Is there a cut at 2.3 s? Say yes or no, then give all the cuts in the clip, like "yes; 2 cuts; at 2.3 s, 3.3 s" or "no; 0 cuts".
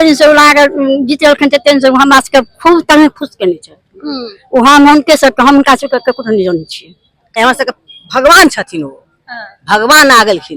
no; 1 cut; at 7.4 s